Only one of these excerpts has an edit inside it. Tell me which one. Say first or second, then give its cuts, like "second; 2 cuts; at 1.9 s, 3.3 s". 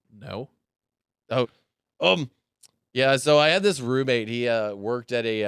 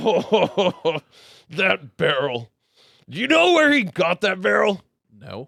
first; 1 cut; at 1.5 s